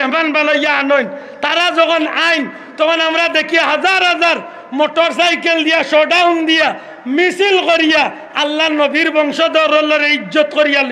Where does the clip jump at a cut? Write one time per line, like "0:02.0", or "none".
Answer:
none